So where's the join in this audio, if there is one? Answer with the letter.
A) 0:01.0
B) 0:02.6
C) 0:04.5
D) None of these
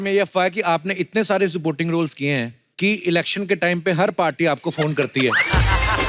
B